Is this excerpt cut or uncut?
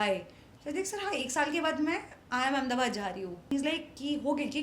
cut